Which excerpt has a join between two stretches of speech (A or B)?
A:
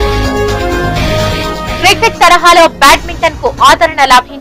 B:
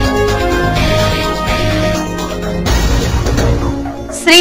B